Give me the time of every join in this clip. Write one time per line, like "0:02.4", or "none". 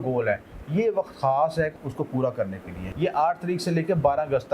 0:01.8
0:02.8